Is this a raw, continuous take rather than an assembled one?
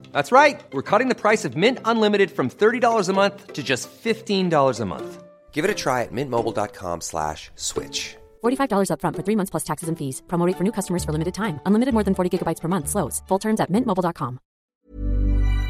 no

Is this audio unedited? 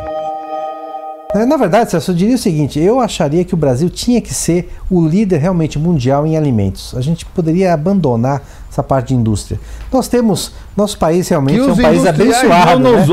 no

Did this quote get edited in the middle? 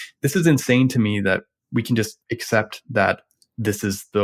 no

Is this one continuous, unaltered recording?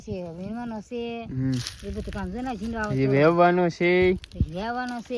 yes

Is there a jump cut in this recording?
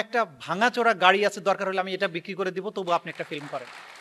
no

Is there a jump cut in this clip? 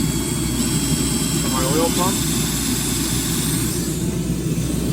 no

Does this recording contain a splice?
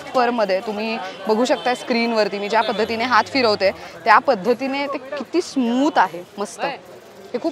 no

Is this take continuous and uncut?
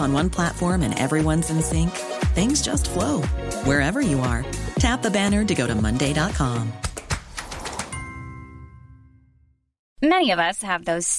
no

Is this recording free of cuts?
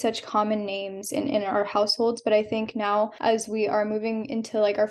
no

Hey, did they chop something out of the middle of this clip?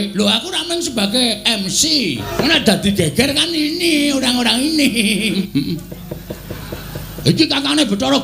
yes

